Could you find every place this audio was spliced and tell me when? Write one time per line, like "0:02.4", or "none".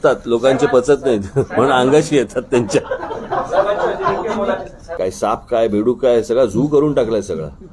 0:04.8